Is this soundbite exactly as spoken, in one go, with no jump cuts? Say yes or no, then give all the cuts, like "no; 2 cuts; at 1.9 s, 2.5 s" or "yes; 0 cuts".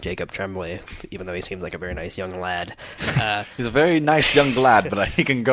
yes; 0 cuts